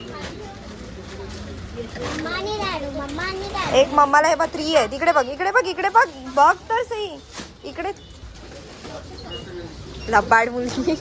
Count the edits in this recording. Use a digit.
0